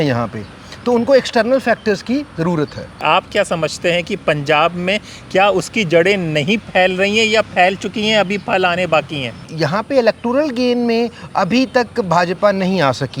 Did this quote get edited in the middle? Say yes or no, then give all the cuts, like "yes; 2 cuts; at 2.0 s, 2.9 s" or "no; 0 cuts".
yes; 2 cuts; at 3.0 s, 9.5 s